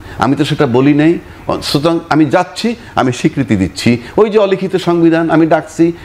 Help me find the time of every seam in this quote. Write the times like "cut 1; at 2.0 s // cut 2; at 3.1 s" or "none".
none

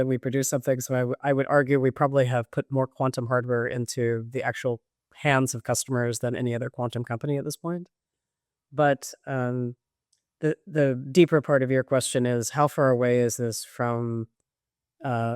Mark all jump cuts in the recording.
none

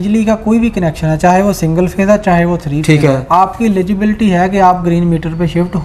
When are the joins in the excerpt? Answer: none

